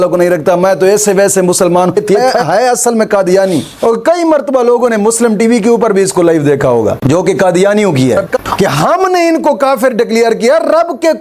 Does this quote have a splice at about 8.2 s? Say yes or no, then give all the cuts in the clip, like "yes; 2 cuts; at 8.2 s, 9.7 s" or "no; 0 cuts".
yes; 3 cuts; at 2.1 s, 3.7 s, 8.2 s